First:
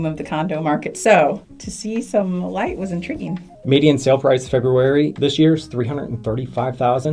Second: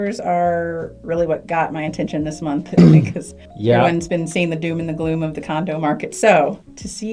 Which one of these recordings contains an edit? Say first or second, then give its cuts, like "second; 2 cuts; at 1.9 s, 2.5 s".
first; 1 cut; at 3.5 s